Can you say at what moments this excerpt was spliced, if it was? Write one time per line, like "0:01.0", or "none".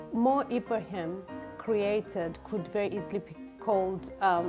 0:02.4